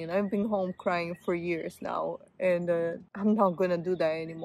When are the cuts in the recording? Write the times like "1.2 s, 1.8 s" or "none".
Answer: 3.1 s